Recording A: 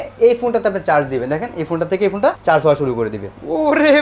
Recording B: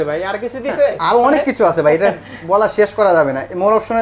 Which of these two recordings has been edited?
A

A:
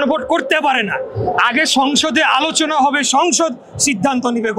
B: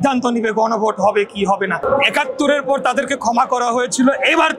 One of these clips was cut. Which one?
B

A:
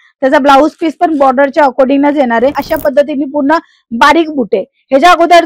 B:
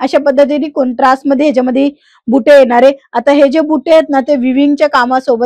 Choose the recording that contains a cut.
A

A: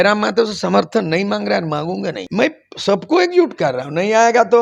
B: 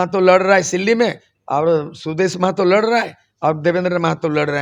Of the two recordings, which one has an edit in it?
A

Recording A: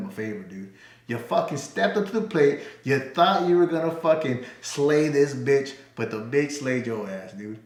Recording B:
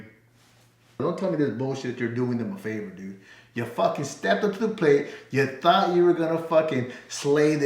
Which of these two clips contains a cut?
B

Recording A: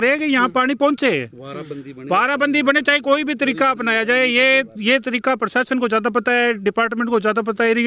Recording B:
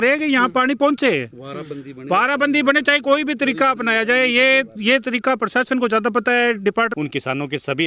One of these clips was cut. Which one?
B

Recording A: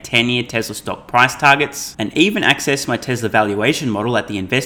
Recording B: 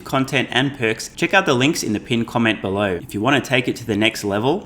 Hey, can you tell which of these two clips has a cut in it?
B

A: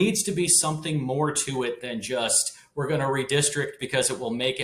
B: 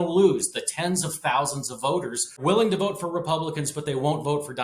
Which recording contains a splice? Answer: B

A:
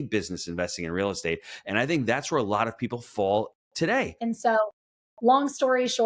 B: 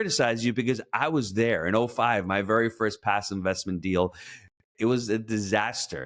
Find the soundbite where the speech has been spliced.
A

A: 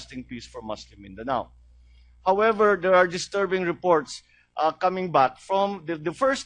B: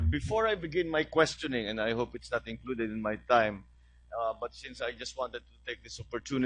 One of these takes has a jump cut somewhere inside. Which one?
A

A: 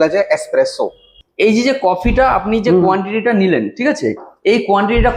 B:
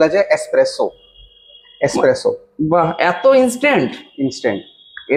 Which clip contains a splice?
A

